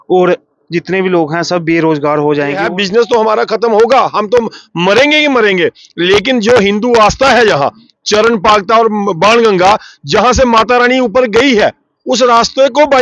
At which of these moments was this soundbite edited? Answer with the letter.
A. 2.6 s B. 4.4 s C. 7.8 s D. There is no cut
A